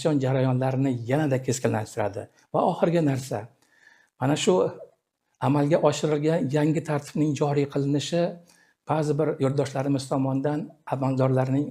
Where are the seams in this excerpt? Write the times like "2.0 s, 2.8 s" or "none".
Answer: none